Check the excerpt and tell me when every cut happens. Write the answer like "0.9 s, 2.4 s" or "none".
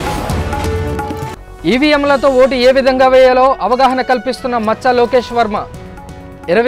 1.3 s

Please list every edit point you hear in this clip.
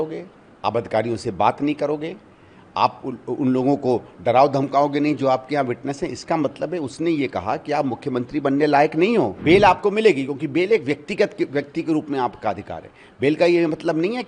9.4 s

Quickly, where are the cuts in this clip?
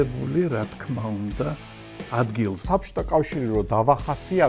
2.6 s

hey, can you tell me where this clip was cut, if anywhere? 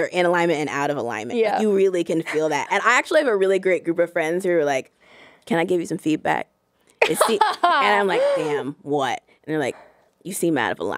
none

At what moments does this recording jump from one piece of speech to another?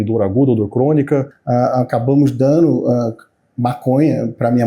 1.4 s

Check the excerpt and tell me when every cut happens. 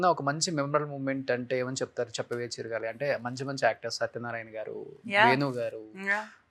none

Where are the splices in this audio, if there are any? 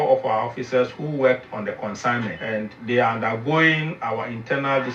2.7 s

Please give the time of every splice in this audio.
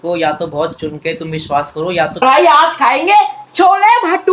2.2 s

